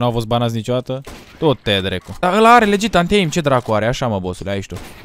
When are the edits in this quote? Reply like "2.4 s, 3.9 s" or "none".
2.2 s